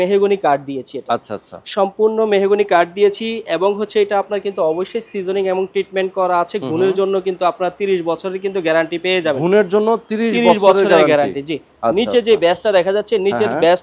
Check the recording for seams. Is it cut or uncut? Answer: uncut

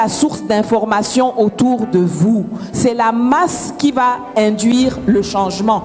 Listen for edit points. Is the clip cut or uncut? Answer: uncut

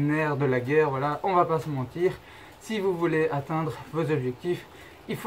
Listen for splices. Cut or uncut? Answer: uncut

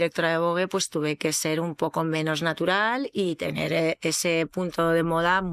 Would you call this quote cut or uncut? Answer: uncut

